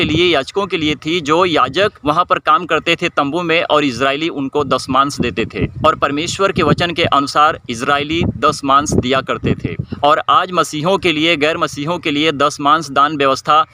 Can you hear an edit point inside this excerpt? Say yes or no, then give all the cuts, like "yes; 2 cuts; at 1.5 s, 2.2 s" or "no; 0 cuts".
yes; 1 cut; at 2.0 s